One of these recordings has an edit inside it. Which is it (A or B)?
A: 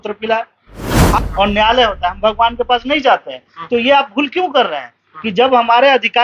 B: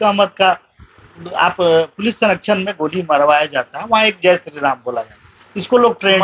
A